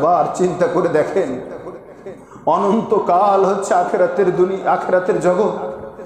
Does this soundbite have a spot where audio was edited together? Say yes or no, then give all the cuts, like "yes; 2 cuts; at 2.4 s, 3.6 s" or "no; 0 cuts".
no; 0 cuts